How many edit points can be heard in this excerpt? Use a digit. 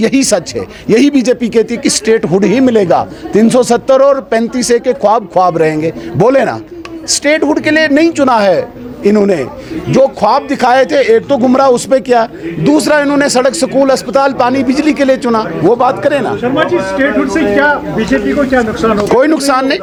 0